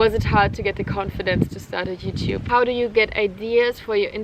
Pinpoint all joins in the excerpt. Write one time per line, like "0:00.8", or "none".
0:02.4